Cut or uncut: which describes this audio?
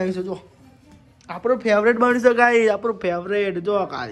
uncut